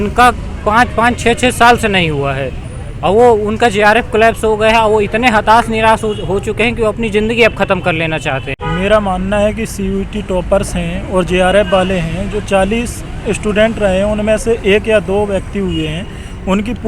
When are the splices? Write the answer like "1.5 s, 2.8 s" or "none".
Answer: 8.5 s